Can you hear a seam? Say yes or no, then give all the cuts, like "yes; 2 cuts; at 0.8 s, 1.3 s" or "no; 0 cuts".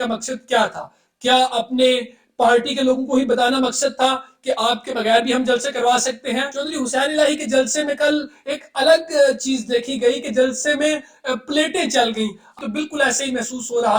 yes; 2 cuts; at 6.6 s, 12.6 s